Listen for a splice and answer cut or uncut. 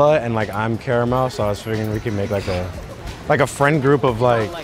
uncut